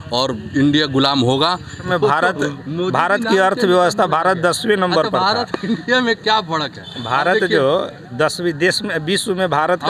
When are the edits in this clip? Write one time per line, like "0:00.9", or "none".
none